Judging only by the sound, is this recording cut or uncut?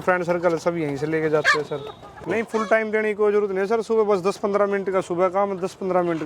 cut